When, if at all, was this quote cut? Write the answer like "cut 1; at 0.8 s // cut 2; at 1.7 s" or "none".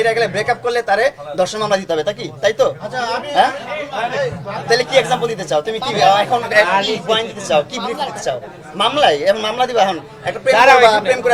none